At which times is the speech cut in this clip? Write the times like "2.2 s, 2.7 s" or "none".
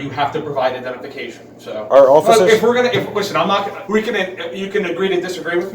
3.8 s